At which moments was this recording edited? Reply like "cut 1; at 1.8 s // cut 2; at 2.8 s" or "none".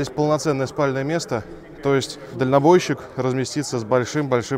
cut 1; at 2.2 s